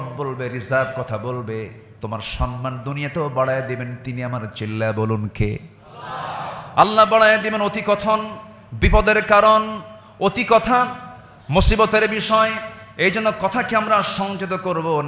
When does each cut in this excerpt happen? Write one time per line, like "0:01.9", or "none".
none